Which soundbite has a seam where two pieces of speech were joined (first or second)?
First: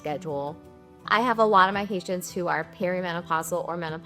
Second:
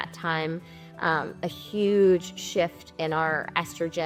first